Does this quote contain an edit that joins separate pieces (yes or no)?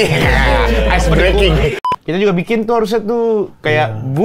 yes